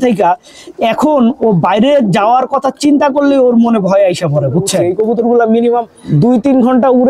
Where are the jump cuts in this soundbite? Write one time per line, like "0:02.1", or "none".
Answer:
0:04.8
0:06.0